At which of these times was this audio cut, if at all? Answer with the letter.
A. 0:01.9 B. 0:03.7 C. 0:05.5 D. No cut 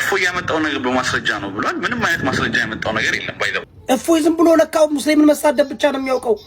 B